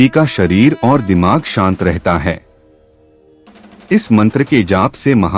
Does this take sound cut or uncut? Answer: uncut